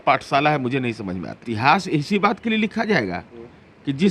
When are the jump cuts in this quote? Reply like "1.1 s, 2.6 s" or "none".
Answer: 1.5 s